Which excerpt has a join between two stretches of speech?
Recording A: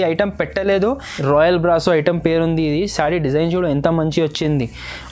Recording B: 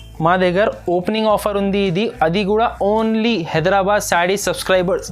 A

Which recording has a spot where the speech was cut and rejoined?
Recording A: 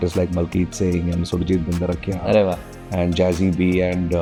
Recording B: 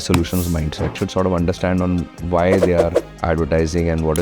B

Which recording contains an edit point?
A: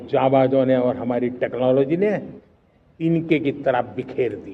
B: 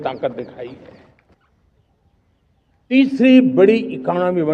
B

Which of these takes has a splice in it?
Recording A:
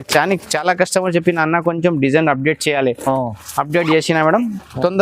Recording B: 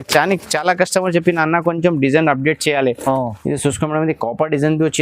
B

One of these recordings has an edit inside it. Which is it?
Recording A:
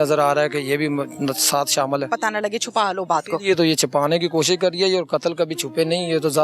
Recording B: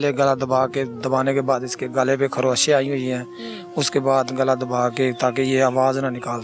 A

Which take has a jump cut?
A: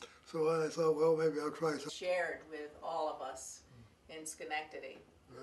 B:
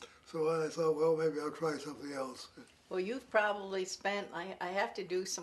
B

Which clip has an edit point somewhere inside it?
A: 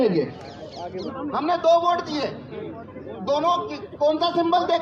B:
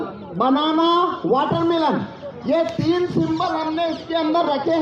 A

